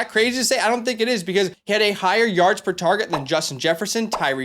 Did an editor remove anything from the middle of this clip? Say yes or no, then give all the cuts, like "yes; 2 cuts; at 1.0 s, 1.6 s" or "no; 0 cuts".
yes; 1 cut; at 1.6 s